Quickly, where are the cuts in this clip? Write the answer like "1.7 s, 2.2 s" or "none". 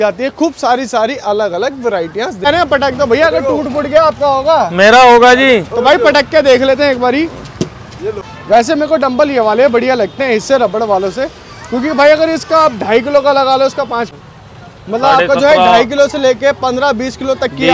2.5 s, 8.3 s, 14.1 s